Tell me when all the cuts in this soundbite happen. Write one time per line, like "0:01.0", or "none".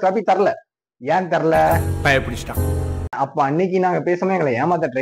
0:03.2

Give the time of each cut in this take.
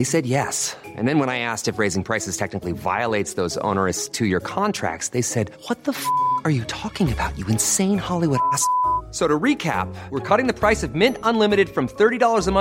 none

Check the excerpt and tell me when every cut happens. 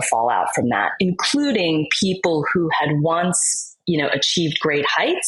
none

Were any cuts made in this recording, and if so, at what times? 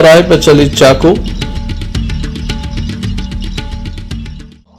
none

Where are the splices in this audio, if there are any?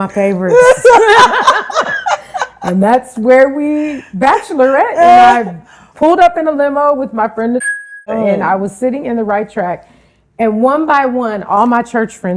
none

